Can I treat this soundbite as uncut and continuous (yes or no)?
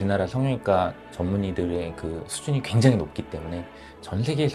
yes